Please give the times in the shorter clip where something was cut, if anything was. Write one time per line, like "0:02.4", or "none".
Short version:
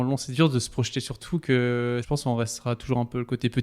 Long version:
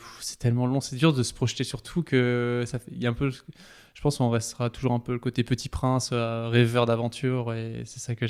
0:02.0